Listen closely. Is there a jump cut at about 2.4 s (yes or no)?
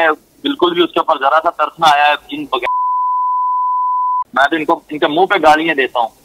no